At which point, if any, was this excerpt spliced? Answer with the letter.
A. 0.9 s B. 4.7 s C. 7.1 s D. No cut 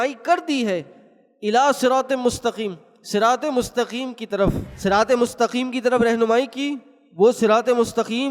B